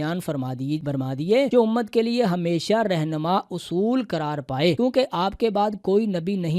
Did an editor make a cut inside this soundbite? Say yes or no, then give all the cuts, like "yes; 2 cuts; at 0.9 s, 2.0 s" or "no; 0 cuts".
yes; 2 cuts; at 1.2 s, 4.8 s